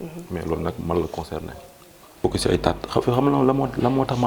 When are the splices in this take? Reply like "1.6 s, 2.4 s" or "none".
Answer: 2.2 s